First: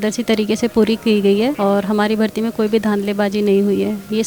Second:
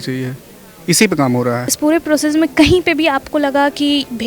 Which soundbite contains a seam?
second; 1 cut; at 1.6 s

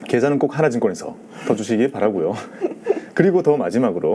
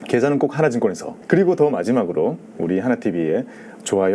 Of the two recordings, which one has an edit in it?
second; 1 cut; at 1.2 s

